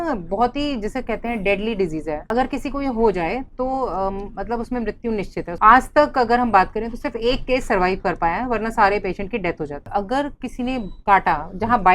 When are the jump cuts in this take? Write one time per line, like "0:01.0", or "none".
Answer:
0:02.3
0:05.5
0:09.8